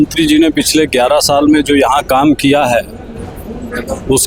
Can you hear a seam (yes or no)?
no